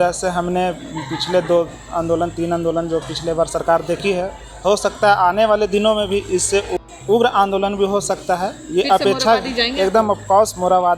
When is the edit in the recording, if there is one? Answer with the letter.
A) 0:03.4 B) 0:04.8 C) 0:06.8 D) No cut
C